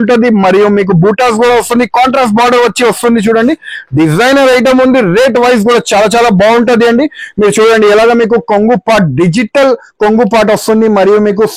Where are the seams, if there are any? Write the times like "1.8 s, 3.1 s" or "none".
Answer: none